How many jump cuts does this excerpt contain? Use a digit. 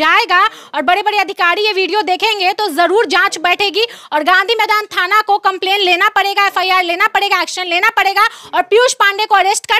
0